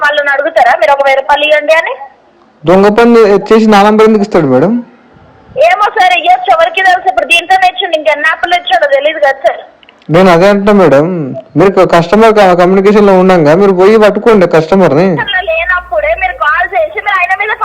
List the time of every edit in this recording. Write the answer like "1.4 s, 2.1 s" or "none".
15.3 s